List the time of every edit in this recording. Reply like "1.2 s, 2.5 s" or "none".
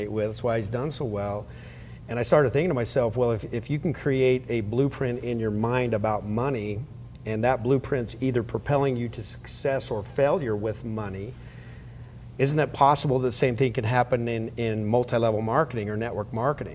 none